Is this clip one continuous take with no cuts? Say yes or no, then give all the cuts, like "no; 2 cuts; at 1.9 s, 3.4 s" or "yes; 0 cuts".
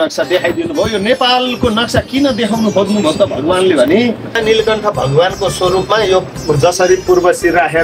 no; 1 cut; at 4.4 s